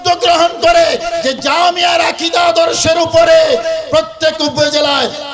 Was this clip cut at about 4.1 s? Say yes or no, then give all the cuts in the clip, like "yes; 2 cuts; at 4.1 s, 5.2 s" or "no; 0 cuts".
no; 0 cuts